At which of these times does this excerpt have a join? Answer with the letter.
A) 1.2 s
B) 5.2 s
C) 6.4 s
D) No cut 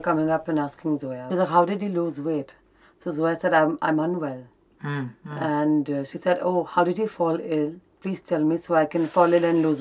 A